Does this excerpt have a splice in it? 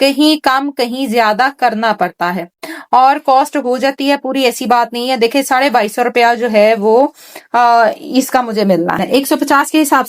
yes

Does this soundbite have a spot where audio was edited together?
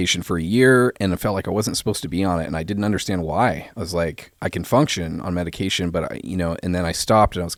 no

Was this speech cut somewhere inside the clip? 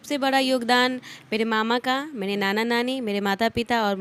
no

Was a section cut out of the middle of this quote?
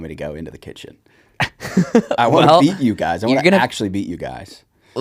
no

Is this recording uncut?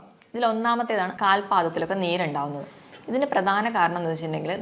no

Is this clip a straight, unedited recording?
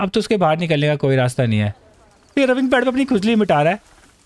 no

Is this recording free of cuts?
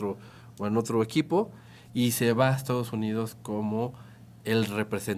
yes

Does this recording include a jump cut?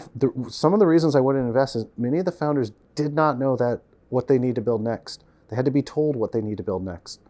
no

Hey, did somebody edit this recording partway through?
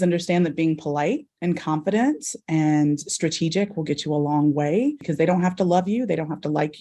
yes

